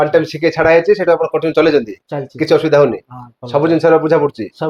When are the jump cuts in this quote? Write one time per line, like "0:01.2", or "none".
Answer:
none